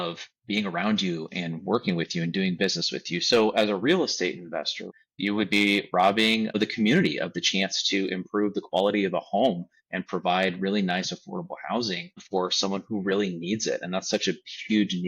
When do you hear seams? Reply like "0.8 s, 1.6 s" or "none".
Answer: 4.9 s